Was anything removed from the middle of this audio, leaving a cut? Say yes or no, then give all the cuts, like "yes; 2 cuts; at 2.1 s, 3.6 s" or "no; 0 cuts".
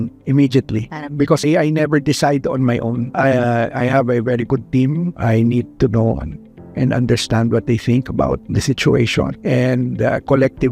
yes; 4 cuts; at 1.4 s, 3.1 s, 8.5 s, 9.4 s